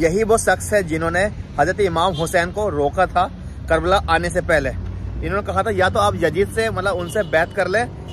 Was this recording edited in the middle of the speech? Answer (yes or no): no